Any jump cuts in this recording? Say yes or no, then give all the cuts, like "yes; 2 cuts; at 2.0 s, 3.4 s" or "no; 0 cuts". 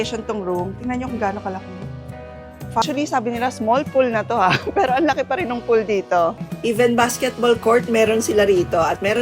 yes; 2 cuts; at 2.8 s, 6.5 s